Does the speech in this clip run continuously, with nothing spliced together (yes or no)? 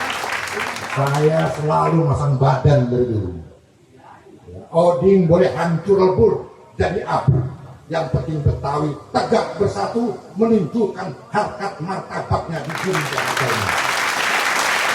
no